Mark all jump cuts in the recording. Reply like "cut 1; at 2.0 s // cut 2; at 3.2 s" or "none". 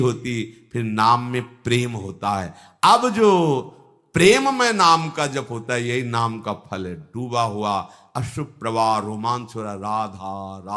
none